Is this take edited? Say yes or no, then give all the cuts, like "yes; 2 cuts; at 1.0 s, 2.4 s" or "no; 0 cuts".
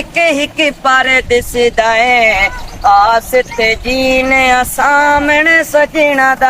no; 0 cuts